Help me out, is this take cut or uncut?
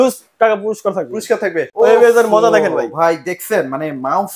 cut